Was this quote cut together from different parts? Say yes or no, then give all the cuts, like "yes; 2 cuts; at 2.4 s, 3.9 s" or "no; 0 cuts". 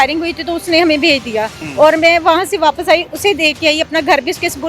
yes; 1 cut; at 1.6 s